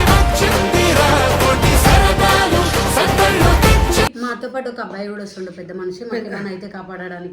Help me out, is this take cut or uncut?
cut